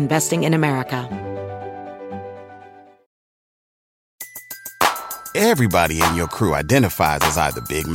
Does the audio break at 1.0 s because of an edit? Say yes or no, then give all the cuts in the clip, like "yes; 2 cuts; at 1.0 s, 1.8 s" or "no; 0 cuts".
yes; 1 cut; at 1.0 s